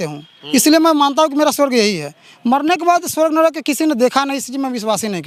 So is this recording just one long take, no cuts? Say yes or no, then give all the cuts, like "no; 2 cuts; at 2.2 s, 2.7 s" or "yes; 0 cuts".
yes; 0 cuts